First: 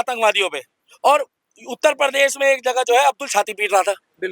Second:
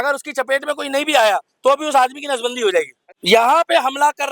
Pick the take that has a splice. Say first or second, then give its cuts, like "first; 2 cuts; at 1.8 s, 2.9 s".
second; 1 cut; at 3.1 s